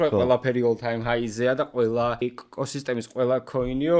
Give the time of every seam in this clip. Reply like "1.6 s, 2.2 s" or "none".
2.2 s

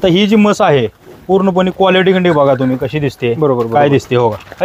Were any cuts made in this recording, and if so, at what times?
none

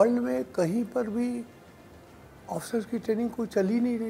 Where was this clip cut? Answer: none

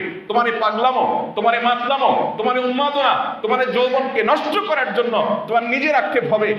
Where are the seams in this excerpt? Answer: none

